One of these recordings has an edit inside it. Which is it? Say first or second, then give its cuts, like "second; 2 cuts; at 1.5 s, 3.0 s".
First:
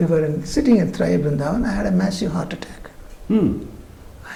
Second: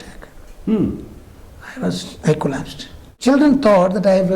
second; 1 cut; at 3.1 s